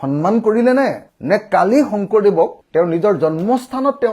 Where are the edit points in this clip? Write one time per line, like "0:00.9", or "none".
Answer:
0:01.1